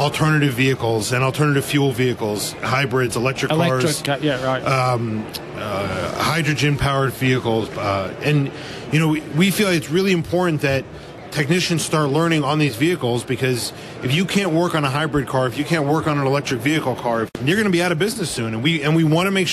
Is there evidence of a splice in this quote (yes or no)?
yes